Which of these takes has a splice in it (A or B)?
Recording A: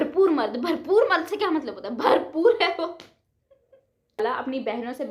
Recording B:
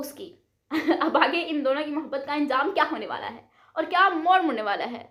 A